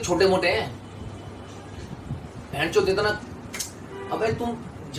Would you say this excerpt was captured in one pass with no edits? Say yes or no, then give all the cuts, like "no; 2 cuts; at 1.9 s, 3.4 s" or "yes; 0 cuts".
yes; 0 cuts